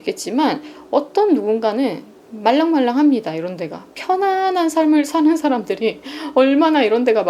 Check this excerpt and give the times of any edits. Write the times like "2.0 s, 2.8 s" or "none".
none